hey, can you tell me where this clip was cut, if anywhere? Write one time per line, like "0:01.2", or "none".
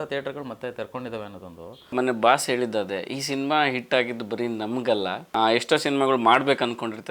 0:01.9
0:05.2